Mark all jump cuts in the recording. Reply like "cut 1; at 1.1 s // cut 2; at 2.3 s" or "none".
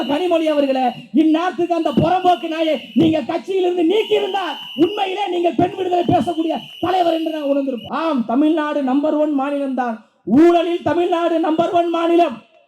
cut 1; at 7.8 s